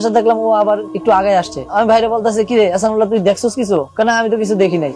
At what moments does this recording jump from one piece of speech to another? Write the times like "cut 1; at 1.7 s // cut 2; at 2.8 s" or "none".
none